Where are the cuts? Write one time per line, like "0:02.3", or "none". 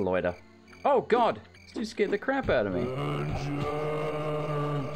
0:01.5